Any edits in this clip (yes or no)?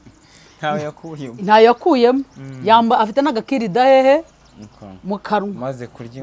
no